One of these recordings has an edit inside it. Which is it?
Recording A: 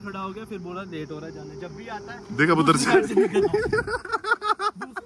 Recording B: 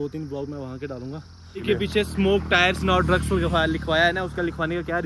B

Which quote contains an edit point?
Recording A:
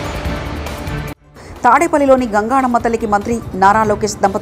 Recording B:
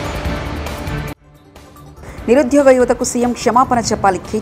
A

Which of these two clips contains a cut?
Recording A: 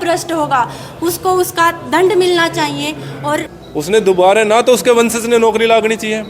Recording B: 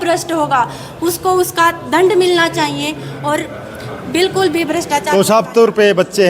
A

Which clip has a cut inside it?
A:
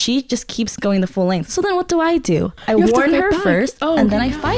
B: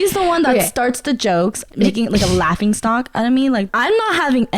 B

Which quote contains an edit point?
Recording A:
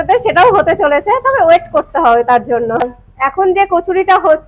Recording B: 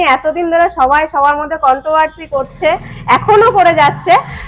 A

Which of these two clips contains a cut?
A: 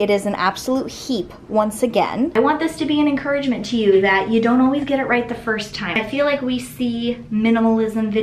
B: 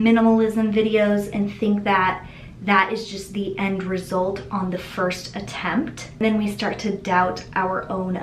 A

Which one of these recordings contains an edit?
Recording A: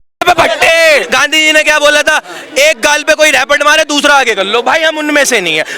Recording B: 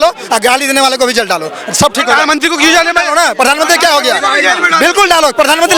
A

